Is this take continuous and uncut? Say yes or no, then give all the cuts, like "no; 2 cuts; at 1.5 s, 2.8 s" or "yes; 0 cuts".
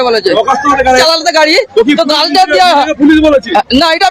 no; 1 cut; at 1.0 s